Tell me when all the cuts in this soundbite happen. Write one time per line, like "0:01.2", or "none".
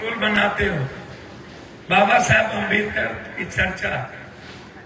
none